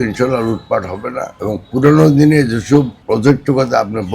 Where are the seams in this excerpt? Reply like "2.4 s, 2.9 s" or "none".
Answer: 3.0 s